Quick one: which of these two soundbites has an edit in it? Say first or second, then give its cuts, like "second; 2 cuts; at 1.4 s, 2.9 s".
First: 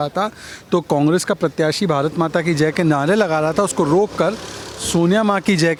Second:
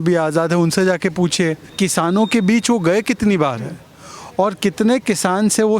second; 1 cut; at 1.7 s